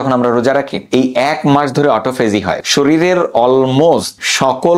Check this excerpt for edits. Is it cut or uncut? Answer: uncut